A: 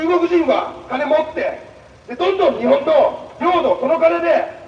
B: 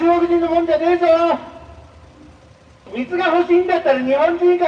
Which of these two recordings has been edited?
B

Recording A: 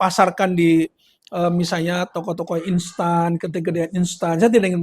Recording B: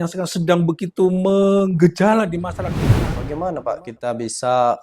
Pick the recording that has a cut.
B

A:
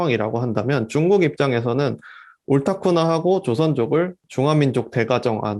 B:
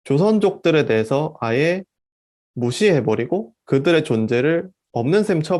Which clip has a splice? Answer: A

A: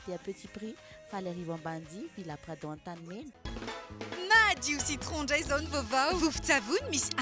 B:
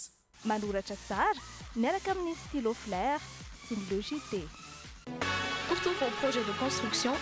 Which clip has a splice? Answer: A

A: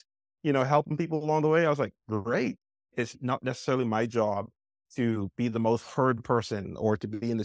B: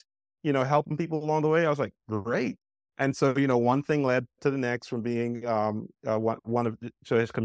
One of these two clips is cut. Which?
A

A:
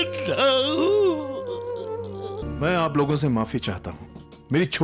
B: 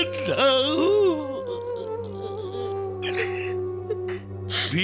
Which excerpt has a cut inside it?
A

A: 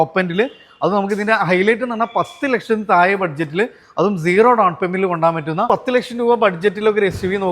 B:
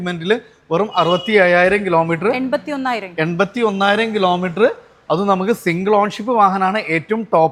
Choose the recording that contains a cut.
A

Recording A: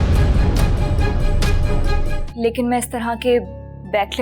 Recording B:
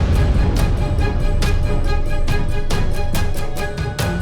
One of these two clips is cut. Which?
A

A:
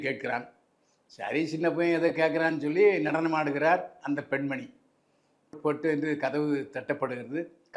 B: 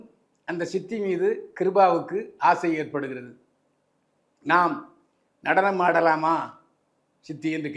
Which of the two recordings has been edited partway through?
A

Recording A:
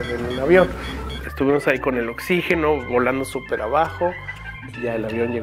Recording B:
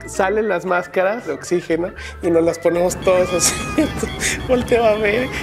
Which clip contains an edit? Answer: B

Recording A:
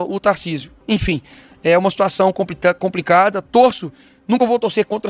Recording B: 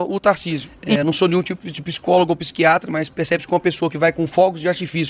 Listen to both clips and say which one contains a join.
B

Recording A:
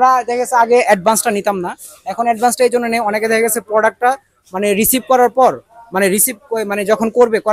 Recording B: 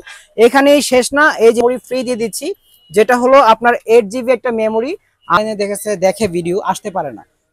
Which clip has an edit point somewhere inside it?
B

